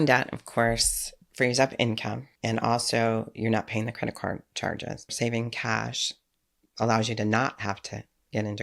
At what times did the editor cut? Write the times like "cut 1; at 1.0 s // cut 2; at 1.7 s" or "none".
cut 1; at 2.3 s // cut 2; at 5.1 s